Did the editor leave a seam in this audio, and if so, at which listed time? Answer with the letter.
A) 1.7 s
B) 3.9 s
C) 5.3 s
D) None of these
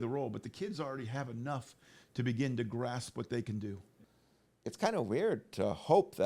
B